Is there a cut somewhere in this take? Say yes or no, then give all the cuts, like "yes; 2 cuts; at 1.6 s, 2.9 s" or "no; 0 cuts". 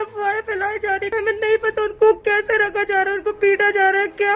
yes; 1 cut; at 1.1 s